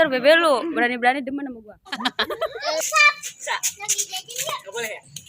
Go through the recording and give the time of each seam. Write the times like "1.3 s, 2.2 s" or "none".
2.8 s

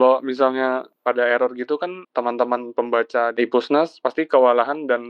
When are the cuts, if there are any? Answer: 0.9 s, 2.0 s, 3.8 s

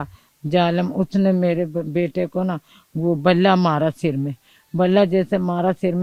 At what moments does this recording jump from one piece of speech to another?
none

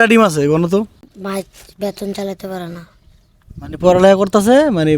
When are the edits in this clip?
1.0 s

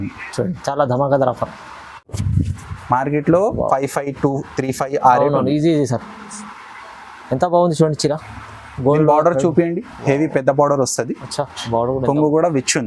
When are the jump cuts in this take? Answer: 2.2 s

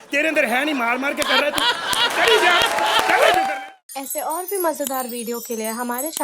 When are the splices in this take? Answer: 3.5 s

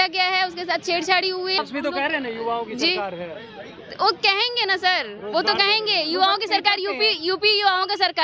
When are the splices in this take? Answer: 1.6 s

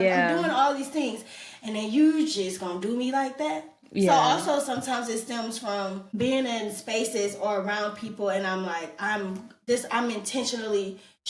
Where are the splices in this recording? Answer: 6.1 s

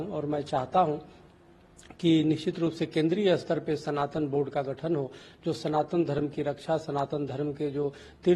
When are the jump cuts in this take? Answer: none

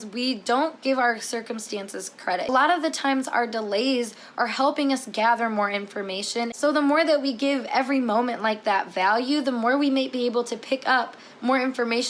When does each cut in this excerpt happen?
2.5 s

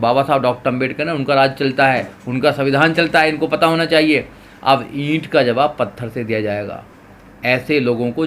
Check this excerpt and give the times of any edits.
none

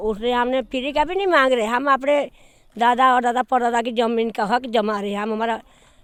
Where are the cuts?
none

